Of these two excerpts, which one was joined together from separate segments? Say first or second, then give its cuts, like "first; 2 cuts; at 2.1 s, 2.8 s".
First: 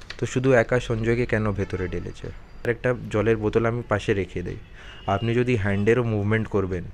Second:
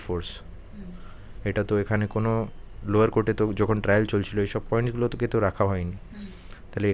first; 1 cut; at 2.7 s